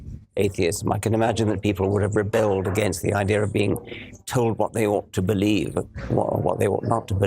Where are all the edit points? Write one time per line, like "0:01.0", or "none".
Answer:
0:06.3